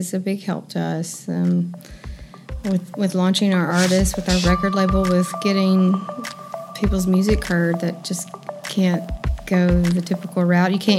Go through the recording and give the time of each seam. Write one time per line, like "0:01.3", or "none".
none